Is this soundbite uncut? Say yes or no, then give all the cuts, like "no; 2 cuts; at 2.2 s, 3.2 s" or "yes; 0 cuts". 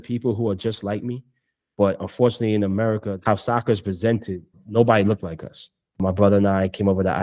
no; 3 cuts; at 3.1 s, 4.6 s, 6.0 s